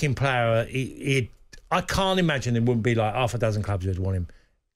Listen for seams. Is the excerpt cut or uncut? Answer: uncut